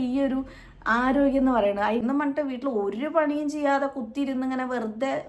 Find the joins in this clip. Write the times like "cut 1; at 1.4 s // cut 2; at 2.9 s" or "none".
cut 1; at 2.0 s